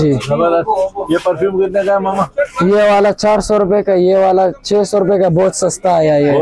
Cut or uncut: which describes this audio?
uncut